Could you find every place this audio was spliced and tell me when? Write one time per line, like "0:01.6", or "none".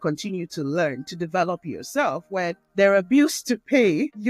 0:02.6